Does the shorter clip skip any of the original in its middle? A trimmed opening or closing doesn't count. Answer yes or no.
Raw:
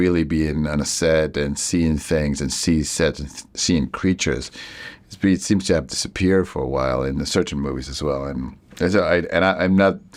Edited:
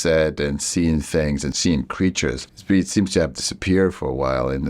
yes